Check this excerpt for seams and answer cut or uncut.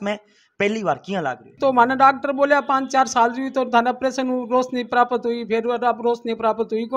cut